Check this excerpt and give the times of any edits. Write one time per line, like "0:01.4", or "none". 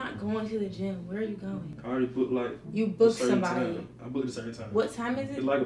0:01.7
0:02.6